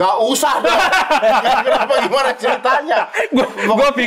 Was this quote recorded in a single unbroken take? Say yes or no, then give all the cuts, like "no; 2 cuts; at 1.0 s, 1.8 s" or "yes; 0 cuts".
yes; 0 cuts